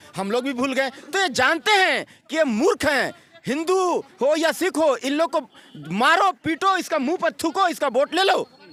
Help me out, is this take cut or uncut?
uncut